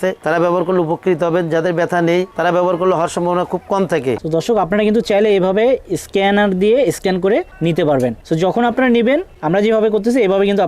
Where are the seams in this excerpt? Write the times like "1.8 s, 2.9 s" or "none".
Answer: 4.2 s, 7.5 s, 8.2 s, 9.3 s